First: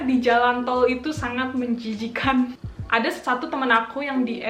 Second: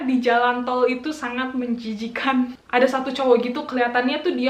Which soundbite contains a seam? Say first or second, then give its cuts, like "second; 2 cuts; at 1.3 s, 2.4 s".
second; 1 cut; at 2.6 s